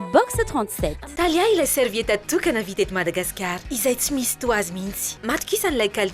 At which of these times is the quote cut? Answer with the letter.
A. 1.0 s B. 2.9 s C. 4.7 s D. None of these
A